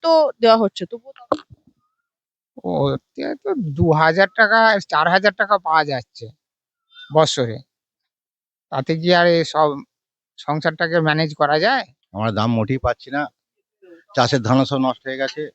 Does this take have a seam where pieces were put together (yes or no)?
yes